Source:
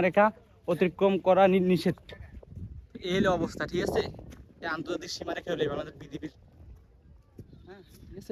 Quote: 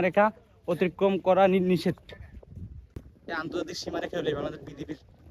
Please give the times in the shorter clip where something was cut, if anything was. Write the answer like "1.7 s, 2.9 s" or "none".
2.9 s